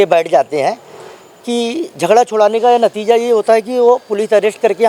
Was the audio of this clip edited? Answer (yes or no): no